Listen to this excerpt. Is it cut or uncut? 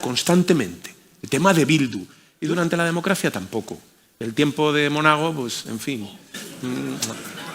cut